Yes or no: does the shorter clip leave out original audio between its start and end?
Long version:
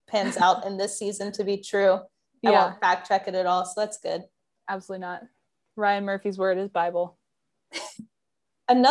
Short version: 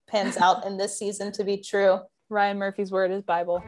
yes